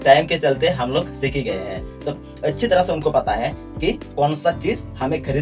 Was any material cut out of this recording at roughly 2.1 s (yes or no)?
yes